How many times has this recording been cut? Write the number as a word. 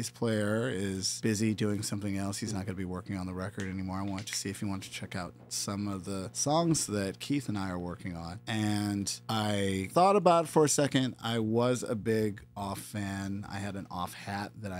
zero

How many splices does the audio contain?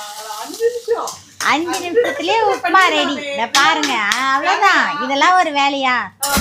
zero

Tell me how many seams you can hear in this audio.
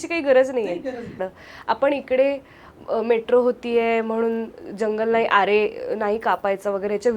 one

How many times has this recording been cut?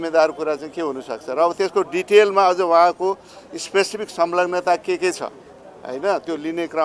zero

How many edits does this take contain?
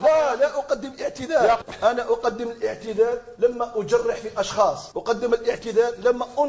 one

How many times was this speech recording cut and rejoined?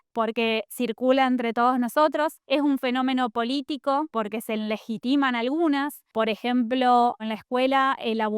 four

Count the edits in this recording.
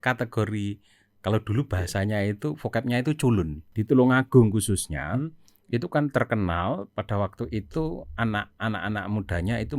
one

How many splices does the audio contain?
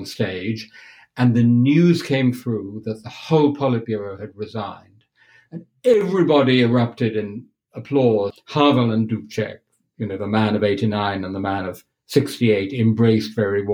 one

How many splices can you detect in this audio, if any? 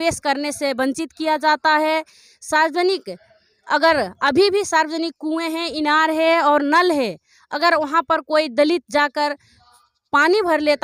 zero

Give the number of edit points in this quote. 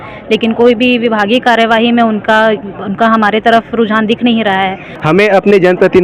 one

